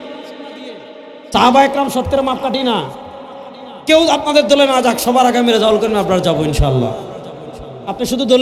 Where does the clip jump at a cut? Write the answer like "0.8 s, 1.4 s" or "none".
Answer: none

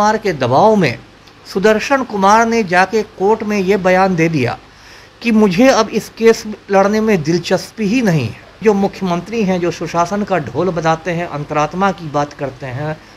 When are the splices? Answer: 8.4 s

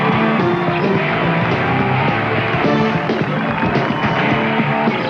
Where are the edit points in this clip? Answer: 1.0 s

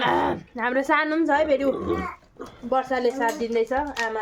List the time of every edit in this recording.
none

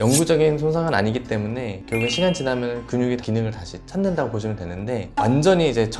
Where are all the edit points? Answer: none

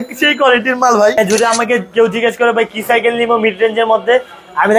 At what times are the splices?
1.2 s

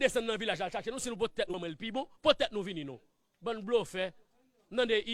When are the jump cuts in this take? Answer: 1.5 s

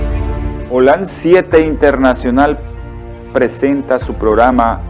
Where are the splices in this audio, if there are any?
3.6 s

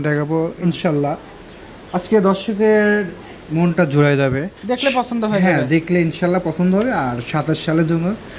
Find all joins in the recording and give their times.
none

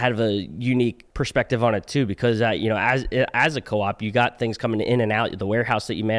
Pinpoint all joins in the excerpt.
1.1 s

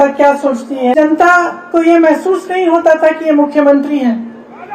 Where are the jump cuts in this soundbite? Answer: 0.9 s

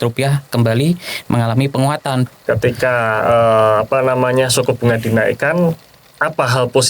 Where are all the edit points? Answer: 2.3 s

